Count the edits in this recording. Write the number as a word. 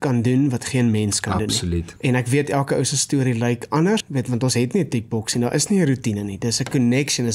two